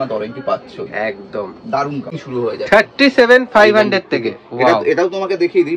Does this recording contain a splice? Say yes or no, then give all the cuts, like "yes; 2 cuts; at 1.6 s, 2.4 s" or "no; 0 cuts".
yes; 1 cut; at 2.2 s